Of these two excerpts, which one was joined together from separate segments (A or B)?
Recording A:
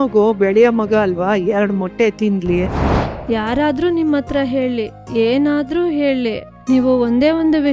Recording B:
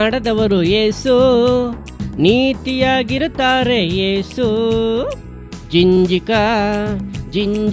A